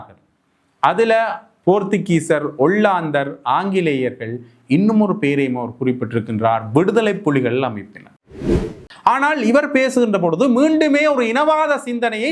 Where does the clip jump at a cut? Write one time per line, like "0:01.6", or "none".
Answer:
0:08.3